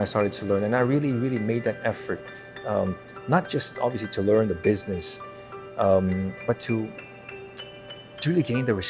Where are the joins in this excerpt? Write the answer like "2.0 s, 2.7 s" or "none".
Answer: none